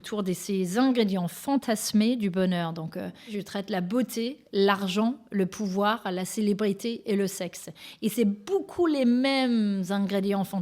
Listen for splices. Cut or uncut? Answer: cut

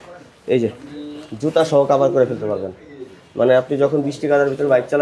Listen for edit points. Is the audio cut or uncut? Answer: uncut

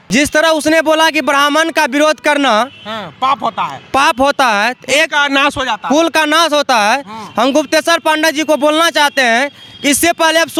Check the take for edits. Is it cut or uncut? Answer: uncut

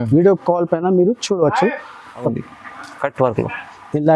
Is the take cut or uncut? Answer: cut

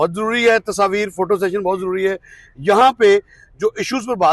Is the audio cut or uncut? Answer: uncut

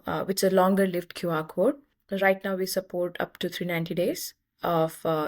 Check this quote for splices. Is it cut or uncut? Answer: cut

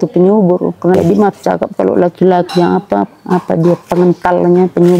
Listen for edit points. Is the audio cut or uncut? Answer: cut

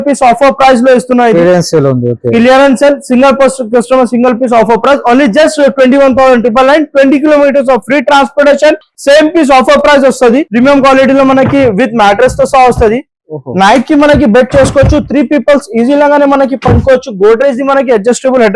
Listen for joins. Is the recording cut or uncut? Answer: cut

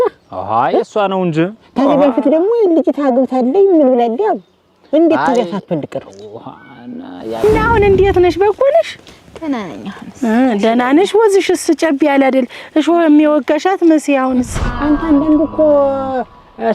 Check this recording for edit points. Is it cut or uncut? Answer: cut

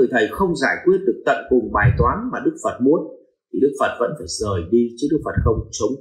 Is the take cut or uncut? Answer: uncut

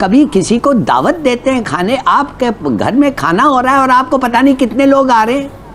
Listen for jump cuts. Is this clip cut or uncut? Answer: uncut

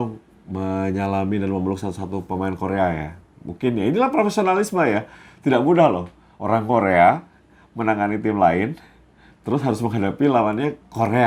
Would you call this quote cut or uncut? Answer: uncut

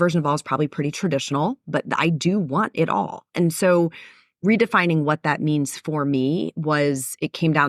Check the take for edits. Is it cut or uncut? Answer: uncut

